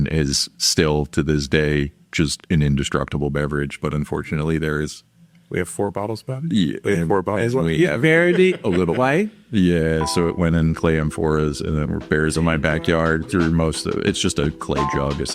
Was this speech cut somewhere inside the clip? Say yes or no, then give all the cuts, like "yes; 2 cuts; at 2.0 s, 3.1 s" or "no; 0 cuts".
no; 0 cuts